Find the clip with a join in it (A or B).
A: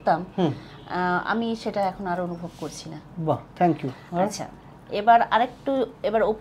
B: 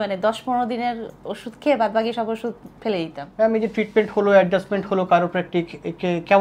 B